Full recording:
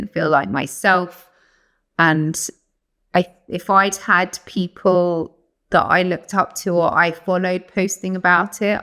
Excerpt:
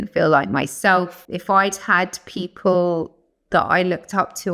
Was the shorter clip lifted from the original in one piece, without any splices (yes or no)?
no